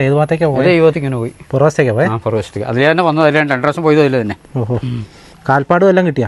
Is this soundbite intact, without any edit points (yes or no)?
yes